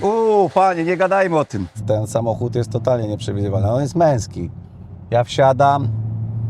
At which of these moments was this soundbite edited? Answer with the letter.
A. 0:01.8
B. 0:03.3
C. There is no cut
A